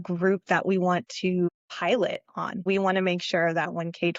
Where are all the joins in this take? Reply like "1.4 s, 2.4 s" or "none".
1.5 s, 2.6 s